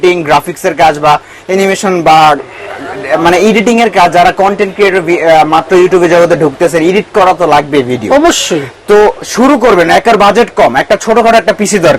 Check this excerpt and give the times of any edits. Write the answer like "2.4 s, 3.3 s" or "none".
none